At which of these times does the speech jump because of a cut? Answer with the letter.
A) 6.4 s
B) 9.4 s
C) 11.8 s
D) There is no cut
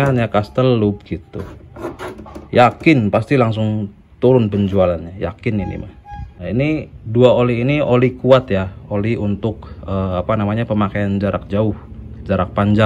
A